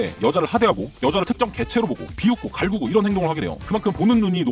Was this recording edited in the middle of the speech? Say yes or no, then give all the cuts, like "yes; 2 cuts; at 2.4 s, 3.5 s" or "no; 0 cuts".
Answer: yes; 1 cut; at 3.6 s